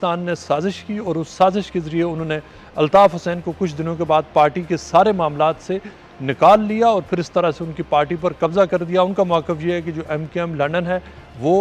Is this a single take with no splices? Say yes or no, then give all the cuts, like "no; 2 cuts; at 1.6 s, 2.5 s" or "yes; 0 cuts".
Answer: yes; 0 cuts